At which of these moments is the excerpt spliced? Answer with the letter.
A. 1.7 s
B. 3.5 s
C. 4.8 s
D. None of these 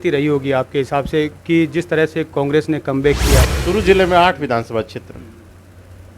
B